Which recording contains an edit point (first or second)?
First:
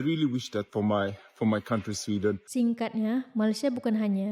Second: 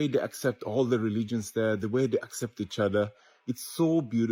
first